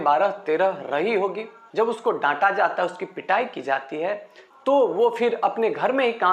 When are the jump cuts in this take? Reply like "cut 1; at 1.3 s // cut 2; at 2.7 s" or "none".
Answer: cut 1; at 1.7 s